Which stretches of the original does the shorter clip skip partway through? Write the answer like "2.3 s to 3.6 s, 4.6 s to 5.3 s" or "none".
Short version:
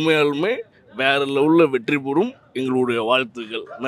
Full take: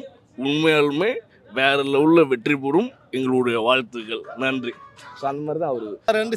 none